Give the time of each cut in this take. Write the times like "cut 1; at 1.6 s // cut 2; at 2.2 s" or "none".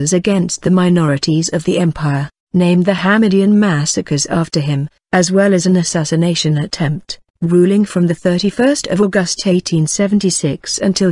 cut 1; at 1.5 s